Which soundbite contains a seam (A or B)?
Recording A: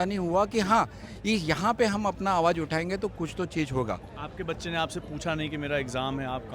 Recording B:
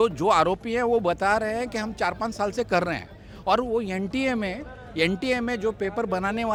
A